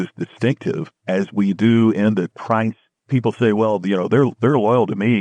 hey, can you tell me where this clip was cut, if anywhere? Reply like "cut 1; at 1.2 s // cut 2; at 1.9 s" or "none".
cut 1; at 0.9 s // cut 2; at 2.6 s